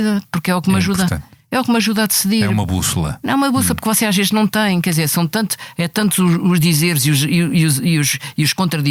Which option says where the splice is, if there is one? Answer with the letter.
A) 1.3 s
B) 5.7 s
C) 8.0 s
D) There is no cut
D